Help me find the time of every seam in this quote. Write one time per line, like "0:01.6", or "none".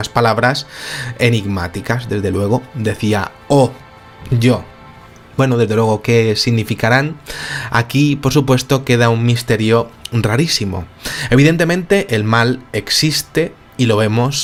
none